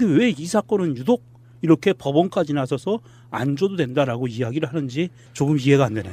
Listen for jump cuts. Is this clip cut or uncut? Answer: uncut